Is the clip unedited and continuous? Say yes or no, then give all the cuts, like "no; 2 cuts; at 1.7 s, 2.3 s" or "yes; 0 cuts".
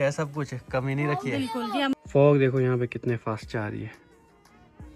no; 1 cut; at 1.9 s